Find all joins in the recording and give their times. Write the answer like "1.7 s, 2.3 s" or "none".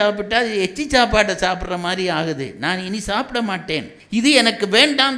4.0 s